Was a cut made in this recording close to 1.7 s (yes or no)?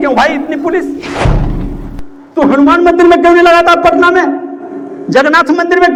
no